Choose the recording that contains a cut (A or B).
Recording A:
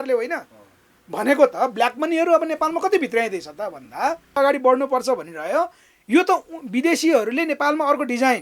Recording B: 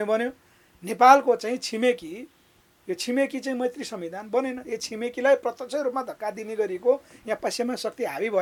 A